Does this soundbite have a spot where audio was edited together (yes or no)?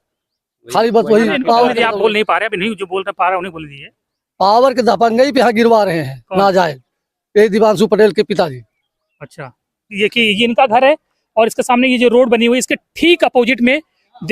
yes